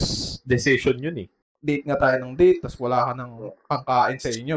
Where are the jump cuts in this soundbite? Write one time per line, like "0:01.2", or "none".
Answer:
0:01.5